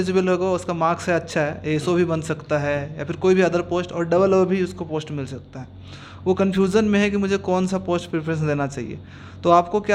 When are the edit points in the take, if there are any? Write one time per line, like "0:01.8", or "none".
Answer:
none